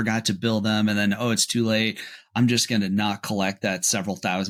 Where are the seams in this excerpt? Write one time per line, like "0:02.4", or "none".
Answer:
none

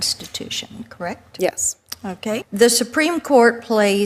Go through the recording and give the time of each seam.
0:02.4

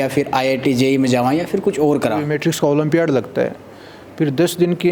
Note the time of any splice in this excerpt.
0:02.2

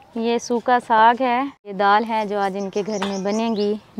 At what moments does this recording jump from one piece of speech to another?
0:01.7

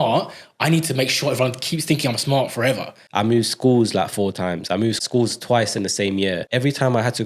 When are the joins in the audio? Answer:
0:02.9
0:05.0
0:06.4

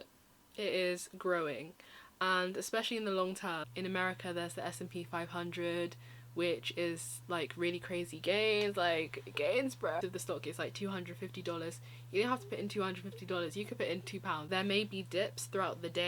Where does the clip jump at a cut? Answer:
0:03.7
0:10.0
0:14.4

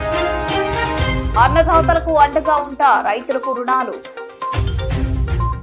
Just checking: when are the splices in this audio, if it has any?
0:01.0

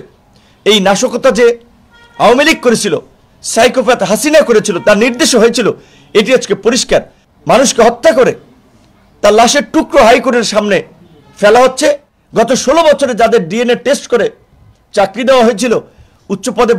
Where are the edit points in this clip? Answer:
0:07.2
0:12.1

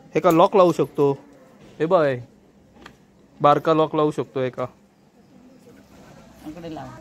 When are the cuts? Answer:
0:06.1

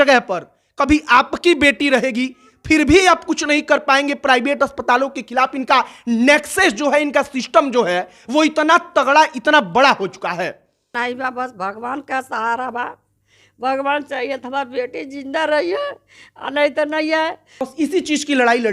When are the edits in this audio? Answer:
0:10.9
0:17.6

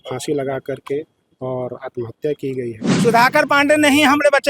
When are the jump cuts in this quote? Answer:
0:02.9

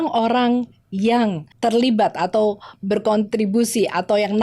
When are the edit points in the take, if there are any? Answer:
0:01.5

